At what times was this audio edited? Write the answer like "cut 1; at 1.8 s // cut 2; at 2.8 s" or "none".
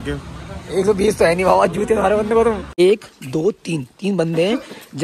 cut 1; at 2.7 s